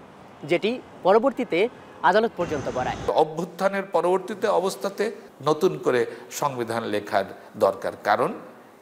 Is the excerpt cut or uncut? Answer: cut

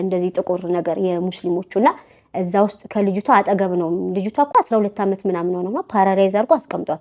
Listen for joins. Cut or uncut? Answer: uncut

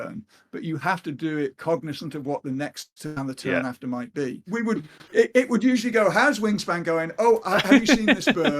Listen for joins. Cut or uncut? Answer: cut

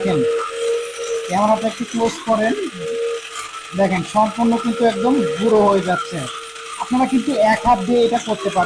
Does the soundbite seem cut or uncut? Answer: uncut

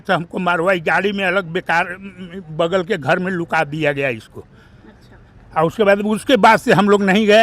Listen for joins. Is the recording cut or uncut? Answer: uncut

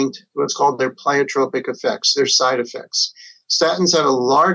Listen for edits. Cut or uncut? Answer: uncut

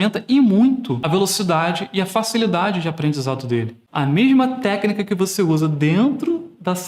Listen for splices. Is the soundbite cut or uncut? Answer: cut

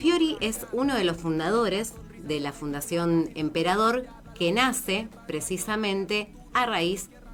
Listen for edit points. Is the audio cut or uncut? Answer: uncut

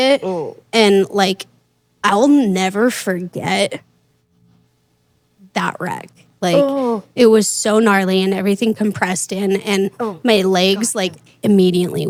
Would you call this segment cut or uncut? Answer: uncut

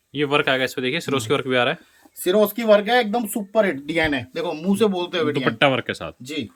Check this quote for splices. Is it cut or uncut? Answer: uncut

